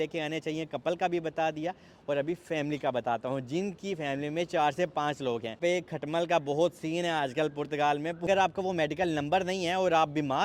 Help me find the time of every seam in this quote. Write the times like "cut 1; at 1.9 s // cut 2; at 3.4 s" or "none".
cut 1; at 5.6 s // cut 2; at 8.2 s